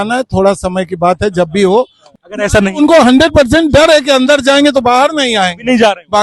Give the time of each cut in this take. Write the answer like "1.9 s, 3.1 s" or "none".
2.0 s